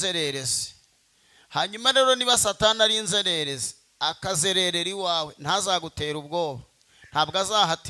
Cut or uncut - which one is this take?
uncut